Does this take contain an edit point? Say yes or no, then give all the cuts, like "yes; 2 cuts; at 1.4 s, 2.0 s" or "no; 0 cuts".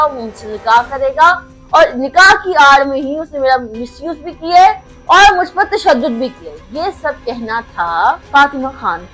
yes; 1 cut; at 8.2 s